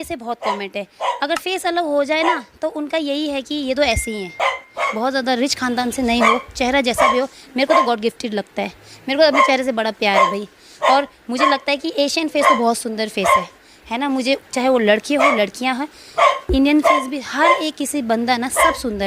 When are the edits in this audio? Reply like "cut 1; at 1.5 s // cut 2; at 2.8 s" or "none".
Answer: cut 1; at 4.6 s